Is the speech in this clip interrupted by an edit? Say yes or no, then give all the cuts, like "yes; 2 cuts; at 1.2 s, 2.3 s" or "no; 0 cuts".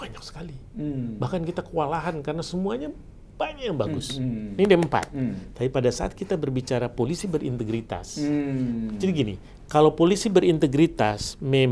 no; 0 cuts